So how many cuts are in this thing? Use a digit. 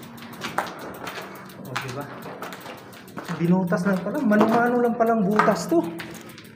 0